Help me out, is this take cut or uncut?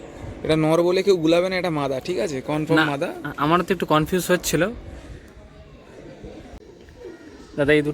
cut